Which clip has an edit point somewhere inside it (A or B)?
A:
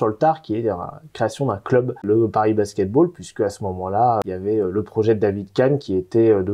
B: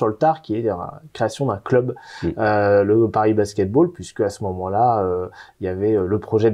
A